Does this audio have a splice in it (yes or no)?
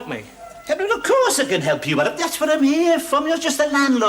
no